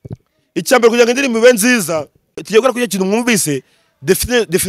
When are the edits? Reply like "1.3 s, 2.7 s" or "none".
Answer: 2.5 s